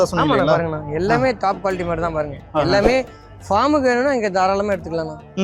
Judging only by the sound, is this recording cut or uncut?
uncut